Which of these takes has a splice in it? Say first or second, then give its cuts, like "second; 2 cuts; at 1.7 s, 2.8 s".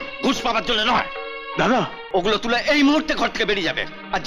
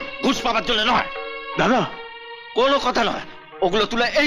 first; 1 cut; at 2.0 s